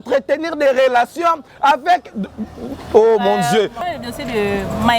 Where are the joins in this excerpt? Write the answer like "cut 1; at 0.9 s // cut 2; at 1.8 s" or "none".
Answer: cut 1; at 3.8 s